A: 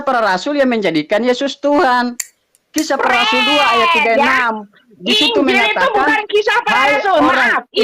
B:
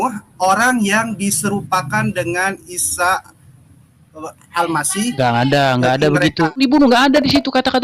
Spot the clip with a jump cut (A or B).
B